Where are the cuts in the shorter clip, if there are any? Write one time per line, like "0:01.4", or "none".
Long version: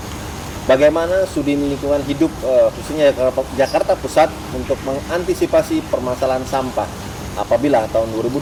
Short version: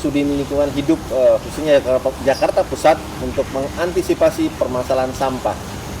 none